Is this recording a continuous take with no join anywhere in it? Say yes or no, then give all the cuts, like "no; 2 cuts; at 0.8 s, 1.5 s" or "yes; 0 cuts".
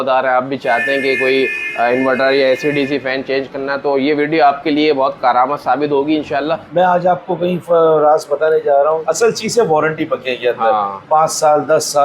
no; 3 cuts; at 5.2 s, 6.6 s, 9.0 s